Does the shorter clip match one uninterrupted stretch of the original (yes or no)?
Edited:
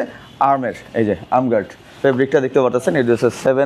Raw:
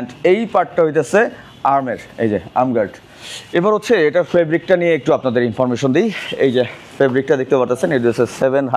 no